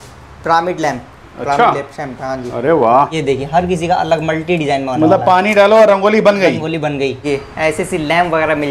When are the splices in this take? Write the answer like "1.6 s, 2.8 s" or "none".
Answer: 3.1 s, 7.2 s